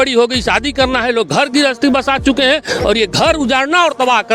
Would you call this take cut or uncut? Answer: uncut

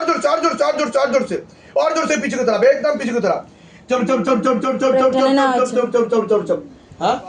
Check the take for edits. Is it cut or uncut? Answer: uncut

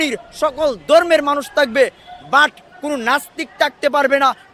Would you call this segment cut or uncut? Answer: uncut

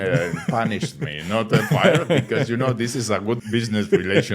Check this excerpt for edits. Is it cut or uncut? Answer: cut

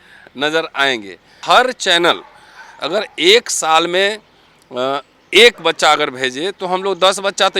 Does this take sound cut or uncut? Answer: cut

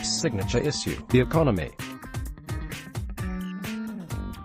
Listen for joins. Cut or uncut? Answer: cut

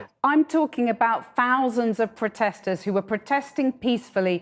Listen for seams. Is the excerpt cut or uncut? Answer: uncut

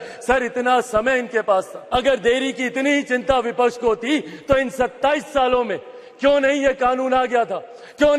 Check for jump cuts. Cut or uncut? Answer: cut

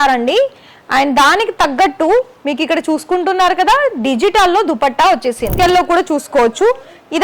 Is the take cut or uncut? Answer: cut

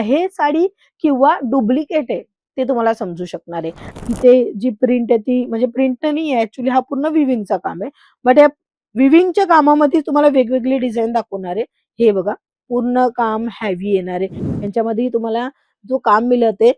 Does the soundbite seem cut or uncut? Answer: cut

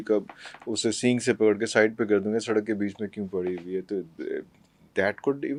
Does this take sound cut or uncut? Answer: uncut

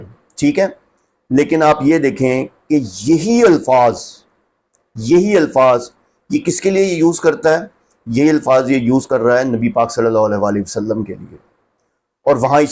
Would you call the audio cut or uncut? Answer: uncut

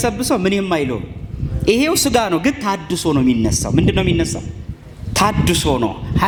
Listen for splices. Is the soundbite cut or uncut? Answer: uncut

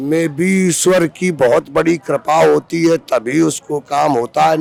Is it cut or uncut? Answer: uncut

